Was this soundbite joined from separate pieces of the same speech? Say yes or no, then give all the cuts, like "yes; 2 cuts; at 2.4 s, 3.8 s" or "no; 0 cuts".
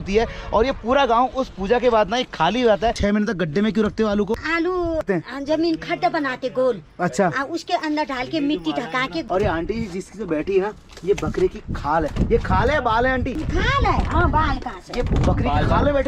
yes; 3 cuts; at 3.0 s, 5.0 s, 9.3 s